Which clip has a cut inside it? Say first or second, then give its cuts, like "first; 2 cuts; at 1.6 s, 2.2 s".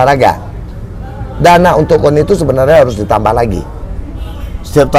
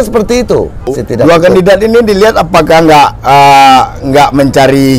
second; 1 cut; at 1.0 s